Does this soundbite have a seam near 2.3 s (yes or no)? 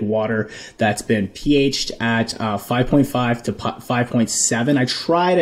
no